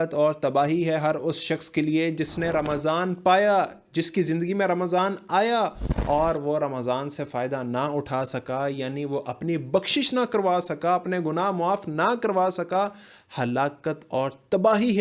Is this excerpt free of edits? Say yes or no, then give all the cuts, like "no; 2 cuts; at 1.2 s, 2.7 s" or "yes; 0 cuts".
yes; 0 cuts